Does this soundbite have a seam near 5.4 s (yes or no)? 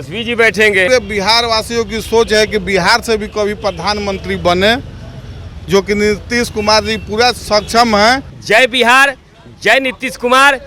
no